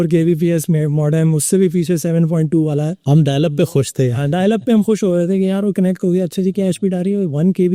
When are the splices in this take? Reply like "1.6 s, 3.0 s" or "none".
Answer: none

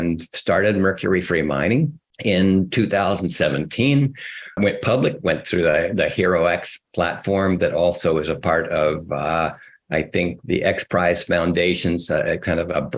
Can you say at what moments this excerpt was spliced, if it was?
2.0 s

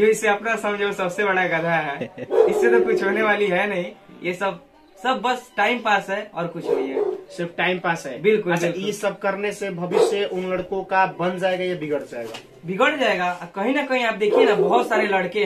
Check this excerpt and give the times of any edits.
none

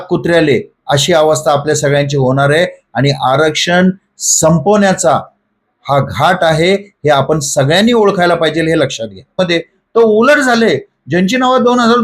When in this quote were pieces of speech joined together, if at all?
9.4 s

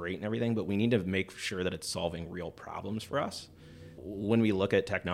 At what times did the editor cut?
4.0 s

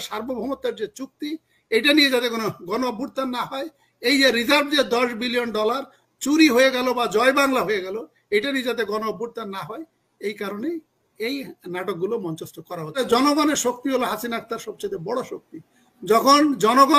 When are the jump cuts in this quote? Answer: 13.0 s

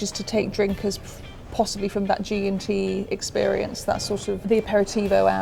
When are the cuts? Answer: none

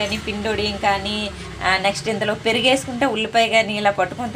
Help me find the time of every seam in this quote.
none

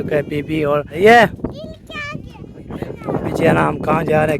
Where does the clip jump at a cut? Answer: 0.9 s

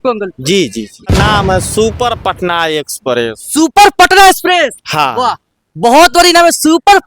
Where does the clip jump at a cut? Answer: 1.1 s

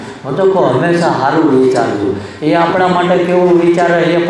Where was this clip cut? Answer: none

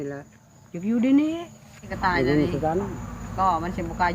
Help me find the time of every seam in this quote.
1.9 s

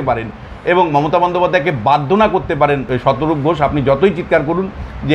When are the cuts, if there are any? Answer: 2.9 s

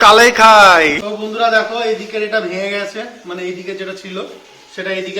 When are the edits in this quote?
1.0 s

